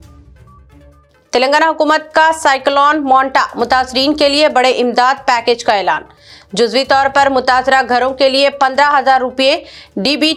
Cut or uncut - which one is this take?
uncut